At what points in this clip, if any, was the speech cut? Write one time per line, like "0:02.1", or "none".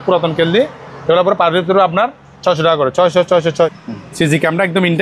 0:03.7